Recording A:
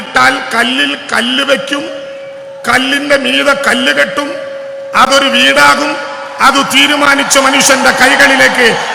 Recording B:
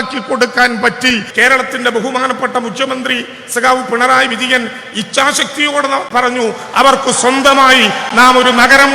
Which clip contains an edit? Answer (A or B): B